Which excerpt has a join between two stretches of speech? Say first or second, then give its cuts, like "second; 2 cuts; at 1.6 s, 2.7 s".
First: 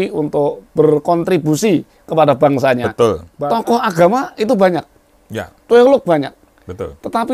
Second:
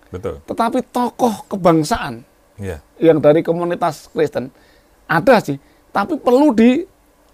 first; 1 cut; at 3.3 s